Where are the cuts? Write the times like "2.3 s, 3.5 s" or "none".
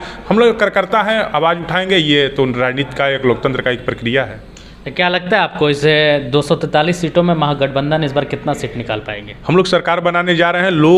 none